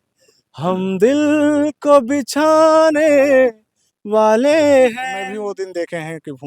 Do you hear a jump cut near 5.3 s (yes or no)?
yes